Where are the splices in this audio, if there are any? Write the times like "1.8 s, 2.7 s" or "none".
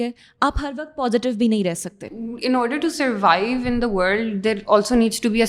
2.1 s